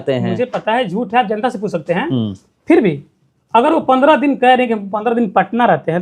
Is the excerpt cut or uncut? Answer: uncut